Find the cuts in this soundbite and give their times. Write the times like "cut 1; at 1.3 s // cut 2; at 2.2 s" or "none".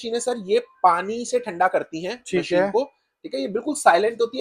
none